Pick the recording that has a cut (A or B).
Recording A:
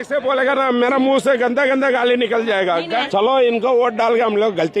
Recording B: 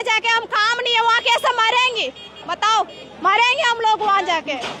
A